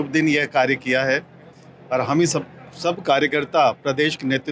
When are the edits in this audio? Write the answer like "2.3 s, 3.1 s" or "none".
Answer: none